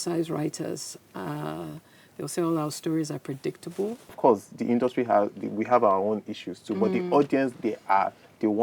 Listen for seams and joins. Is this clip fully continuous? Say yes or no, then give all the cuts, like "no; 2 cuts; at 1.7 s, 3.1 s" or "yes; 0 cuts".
no; 1 cut; at 4.1 s